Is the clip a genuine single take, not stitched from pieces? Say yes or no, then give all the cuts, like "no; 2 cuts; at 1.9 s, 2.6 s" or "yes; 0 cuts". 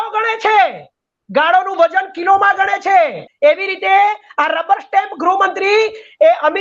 no; 1 cut; at 3.2 s